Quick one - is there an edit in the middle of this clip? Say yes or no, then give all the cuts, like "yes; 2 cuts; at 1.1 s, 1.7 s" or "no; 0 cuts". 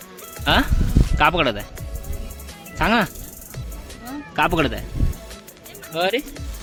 no; 0 cuts